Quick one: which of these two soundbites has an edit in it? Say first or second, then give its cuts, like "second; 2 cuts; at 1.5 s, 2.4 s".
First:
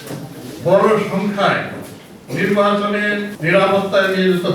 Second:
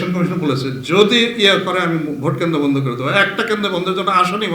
first; 1 cut; at 3.3 s